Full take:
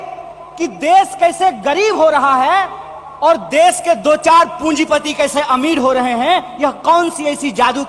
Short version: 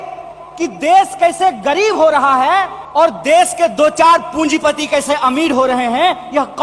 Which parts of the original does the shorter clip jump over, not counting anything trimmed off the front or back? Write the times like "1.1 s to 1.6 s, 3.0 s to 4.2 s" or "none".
2.8 s to 3.0 s